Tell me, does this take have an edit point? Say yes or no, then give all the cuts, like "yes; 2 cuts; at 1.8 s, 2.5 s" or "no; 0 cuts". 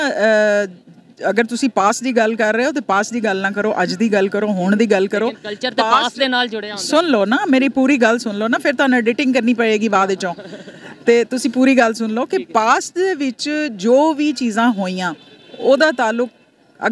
no; 0 cuts